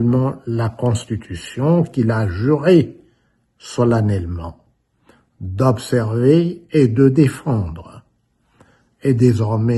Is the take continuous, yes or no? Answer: yes